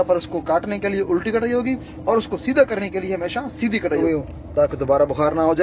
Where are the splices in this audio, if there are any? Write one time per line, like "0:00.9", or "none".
0:03.9